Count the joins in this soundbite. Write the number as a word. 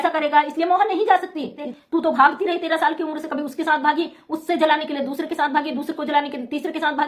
one